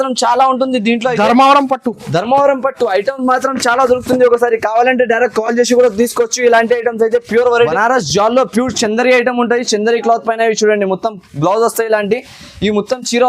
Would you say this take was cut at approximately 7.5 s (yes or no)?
yes